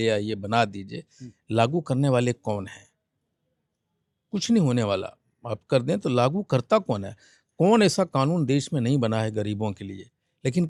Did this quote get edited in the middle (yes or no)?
no